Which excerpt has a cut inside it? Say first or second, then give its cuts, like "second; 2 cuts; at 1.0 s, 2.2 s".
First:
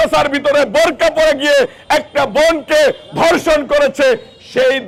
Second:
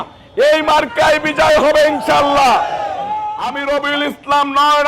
second; 1 cut; at 3.6 s